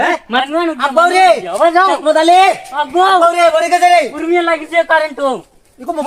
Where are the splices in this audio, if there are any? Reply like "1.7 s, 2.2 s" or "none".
none